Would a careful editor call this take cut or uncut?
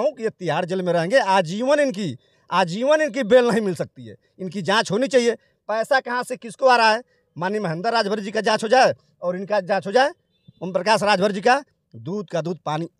uncut